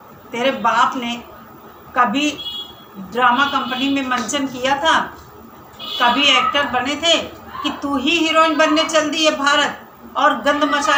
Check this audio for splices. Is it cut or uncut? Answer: uncut